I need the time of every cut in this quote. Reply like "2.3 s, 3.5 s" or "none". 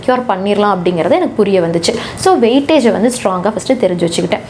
none